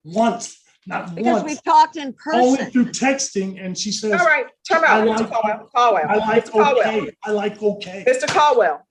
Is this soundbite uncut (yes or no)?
yes